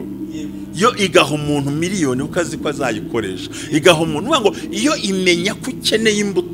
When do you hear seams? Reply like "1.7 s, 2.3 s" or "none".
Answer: none